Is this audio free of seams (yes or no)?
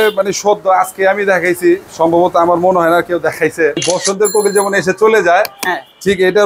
no